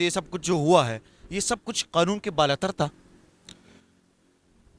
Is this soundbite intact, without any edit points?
yes; 0 cuts

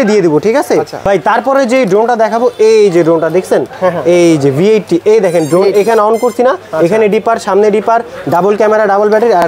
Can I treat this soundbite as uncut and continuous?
yes; 0 cuts

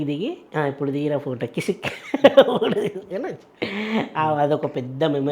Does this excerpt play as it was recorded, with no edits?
yes; 0 cuts

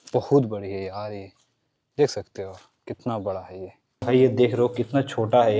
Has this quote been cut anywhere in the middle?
yes; 1 cut; at 3.9 s

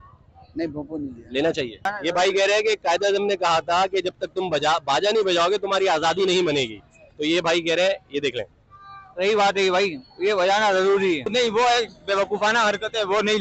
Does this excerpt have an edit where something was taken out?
yes; 2 cuts; at 1.9 s, 11.3 s

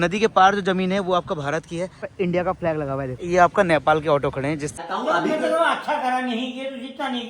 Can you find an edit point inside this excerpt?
yes; 3 cuts; at 2.1 s, 3.2 s, 4.8 s

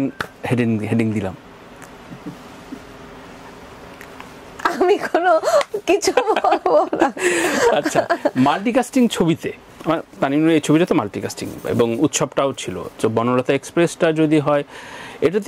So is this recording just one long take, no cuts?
yes; 0 cuts

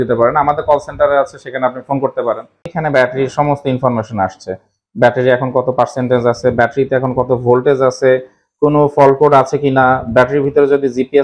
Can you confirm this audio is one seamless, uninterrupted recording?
no; 1 cut; at 2.8 s

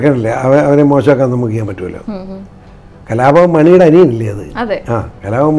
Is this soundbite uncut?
yes; 0 cuts

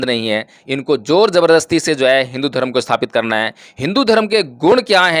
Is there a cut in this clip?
no; 0 cuts

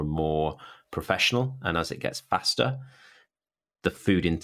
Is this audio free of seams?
yes; 0 cuts

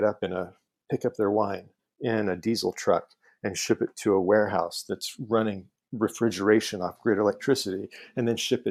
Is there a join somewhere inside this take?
no; 0 cuts

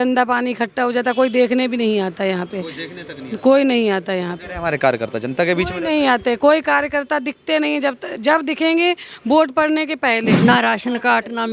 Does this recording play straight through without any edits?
no; 1 cut; at 10.3 s

